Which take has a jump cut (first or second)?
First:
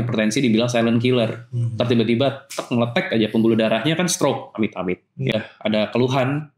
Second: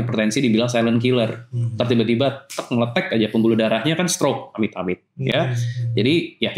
first